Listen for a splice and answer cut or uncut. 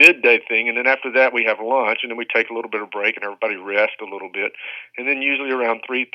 uncut